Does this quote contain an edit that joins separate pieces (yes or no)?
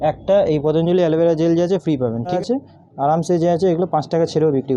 yes